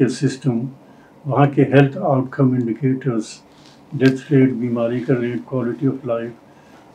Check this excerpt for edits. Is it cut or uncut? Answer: uncut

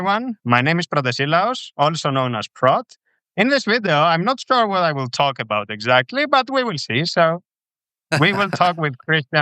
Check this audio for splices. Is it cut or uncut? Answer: uncut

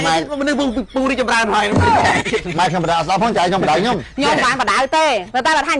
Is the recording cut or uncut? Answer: uncut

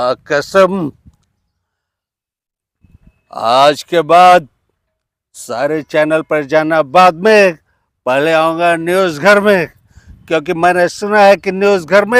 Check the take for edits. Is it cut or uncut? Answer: uncut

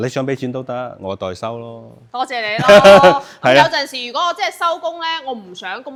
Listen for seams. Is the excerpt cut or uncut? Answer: uncut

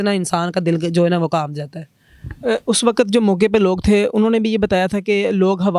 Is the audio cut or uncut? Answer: uncut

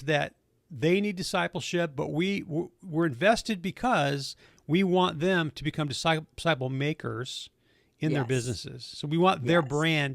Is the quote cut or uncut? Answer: uncut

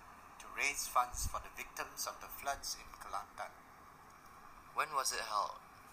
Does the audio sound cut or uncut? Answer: cut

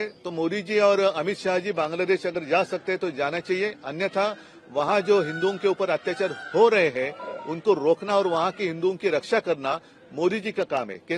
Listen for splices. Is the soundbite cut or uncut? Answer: uncut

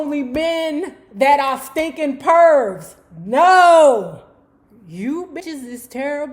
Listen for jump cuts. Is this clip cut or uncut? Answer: cut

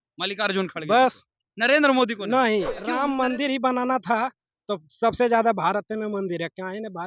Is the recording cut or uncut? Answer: cut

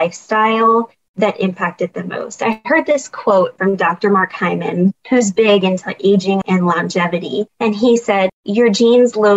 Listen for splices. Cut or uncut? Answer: cut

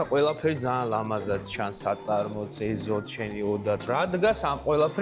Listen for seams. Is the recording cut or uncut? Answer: cut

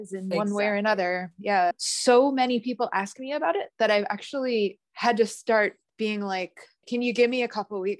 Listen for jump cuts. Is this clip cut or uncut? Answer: cut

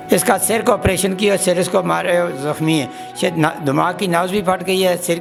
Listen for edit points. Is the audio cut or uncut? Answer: uncut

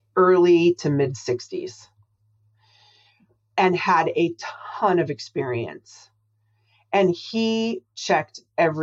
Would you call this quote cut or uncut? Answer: uncut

